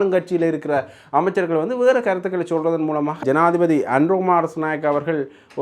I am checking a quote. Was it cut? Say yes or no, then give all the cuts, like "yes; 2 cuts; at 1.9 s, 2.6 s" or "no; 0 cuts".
yes; 1 cut; at 3.2 s